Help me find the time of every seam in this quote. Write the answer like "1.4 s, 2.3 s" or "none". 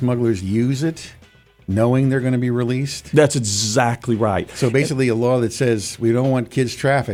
none